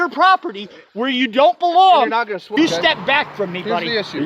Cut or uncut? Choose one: cut